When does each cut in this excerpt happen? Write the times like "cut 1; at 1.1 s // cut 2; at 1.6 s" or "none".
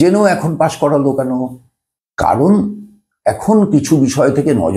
none